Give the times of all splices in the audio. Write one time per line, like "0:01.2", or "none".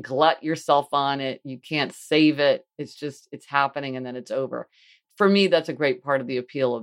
none